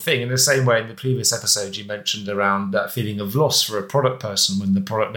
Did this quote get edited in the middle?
no; 0 cuts

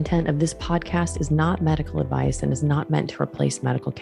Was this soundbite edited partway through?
no; 0 cuts

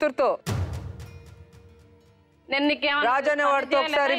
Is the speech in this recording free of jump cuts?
yes; 0 cuts

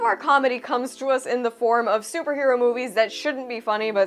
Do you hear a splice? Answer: no; 0 cuts

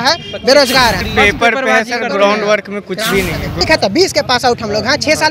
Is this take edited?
yes; 2 cuts; at 1.0 s, 3.6 s

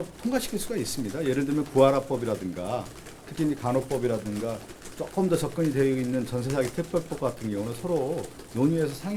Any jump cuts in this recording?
no; 0 cuts

